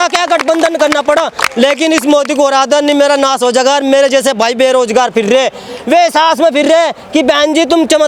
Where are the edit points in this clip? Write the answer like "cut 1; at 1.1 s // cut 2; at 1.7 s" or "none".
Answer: none